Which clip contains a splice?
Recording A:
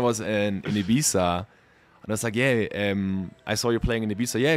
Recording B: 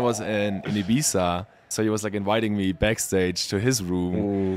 B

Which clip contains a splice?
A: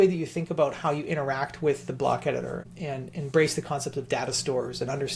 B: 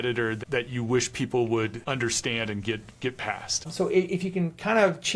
B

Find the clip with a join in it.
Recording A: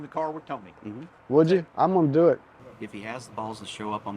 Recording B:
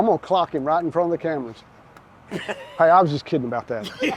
A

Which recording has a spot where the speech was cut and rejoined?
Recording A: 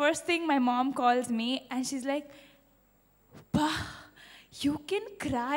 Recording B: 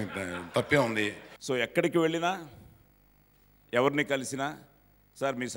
B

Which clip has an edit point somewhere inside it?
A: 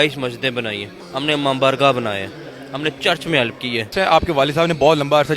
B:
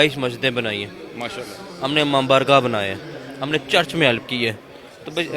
A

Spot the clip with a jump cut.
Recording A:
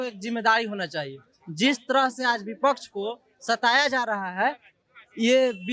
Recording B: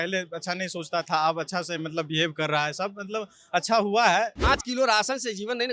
B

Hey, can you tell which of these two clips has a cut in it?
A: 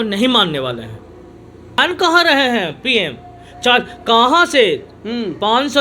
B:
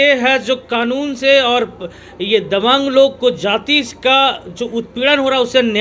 A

